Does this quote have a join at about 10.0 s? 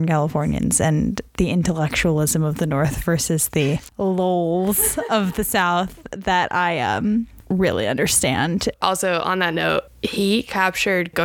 yes; 2 cuts; at 8.7 s, 10.0 s

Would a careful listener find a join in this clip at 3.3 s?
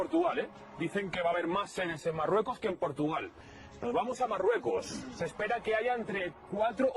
yes; 1 cut; at 3.3 s

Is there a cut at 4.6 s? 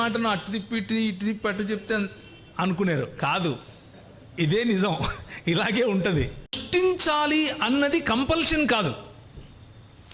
no; 1 cut; at 6.6 s

